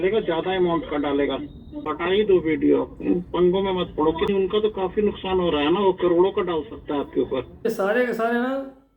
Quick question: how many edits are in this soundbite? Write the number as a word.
three